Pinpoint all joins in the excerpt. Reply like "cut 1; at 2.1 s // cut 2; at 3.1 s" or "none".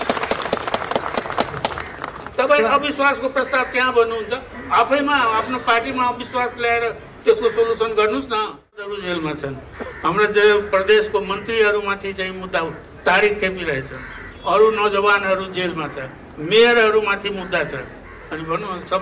cut 1; at 8.9 s